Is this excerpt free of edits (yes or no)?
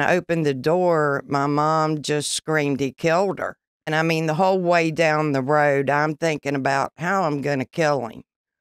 no